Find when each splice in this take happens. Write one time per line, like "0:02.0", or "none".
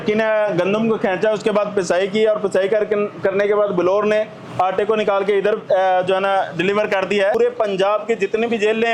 0:07.4

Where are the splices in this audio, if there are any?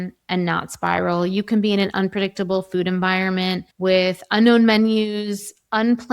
0:03.7

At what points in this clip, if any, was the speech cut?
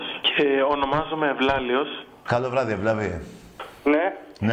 0:02.7

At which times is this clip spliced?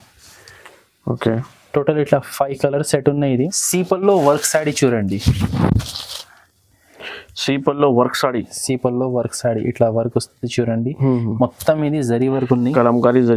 0:03.3

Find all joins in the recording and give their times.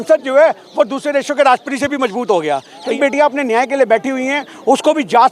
0:03.0

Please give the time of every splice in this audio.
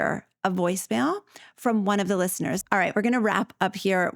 0:02.6

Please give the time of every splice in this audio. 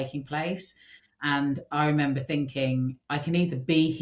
0:03.0

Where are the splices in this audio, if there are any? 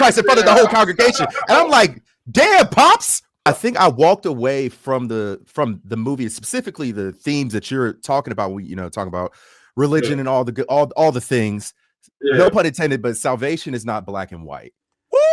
0:03.4

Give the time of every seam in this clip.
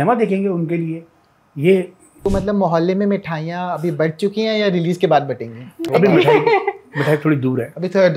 0:02.0
0:05.9

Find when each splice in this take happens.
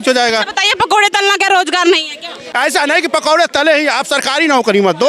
0:02.4

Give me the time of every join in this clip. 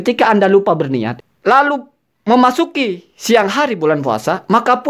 0:01.1

